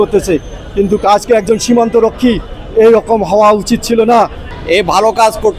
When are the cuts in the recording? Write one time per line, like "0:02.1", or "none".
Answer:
0:04.4